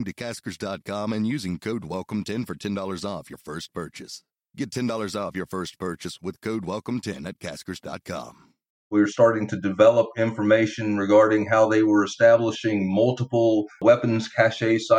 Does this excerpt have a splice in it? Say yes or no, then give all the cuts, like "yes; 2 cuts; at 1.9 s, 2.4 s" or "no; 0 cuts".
yes; 2 cuts; at 8.8 s, 13.8 s